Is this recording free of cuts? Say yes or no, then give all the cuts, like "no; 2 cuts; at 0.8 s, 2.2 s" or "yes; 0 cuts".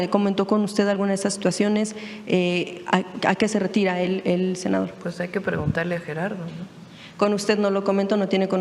yes; 0 cuts